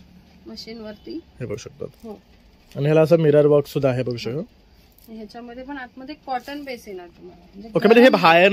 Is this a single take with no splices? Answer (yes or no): yes